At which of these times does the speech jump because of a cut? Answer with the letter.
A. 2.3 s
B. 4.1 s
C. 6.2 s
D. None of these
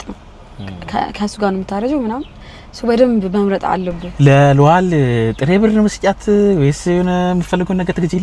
B